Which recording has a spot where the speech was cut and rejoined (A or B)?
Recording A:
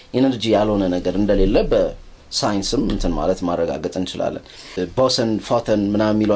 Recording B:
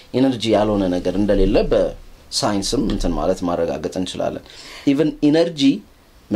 A